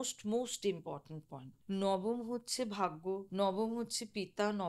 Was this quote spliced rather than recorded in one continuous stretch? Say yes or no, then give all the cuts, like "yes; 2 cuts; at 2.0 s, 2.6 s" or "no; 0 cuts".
yes; 2 cuts; at 1.5 s, 3.3 s